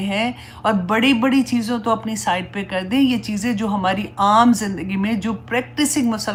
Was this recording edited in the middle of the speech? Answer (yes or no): no